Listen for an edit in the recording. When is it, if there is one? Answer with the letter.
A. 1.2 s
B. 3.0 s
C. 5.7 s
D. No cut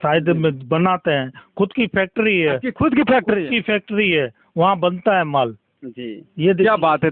D